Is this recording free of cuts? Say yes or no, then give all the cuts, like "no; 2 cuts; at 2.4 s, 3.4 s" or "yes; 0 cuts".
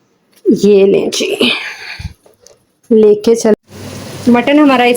no; 1 cut; at 3.5 s